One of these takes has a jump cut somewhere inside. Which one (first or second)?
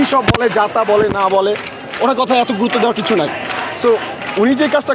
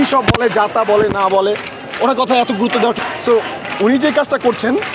second